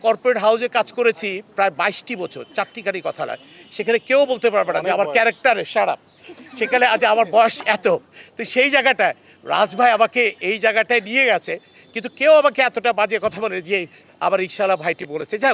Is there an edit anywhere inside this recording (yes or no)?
no